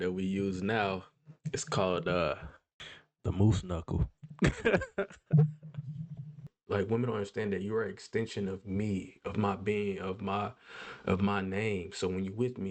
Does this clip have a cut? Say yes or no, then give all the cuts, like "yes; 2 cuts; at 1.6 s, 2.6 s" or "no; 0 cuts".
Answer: yes; 1 cut; at 6.4 s